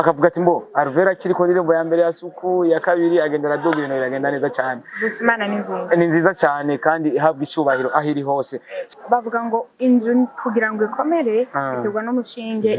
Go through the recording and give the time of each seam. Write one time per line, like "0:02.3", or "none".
0:08.8